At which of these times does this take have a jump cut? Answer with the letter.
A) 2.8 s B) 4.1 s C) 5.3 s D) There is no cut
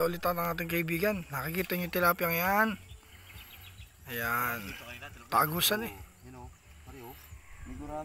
D